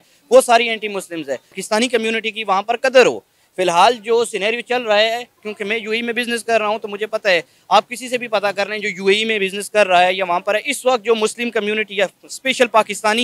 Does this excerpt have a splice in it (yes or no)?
yes